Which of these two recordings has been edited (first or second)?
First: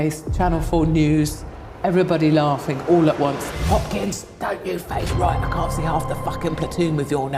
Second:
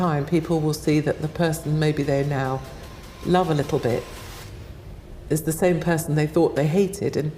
first